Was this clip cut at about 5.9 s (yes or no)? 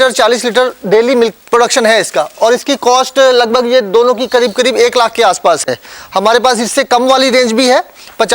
no